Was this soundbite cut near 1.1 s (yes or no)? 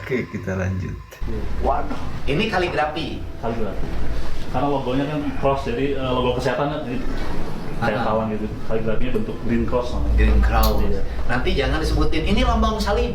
yes